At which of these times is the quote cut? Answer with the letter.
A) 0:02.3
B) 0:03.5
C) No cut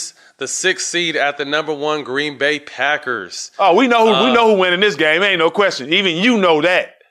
C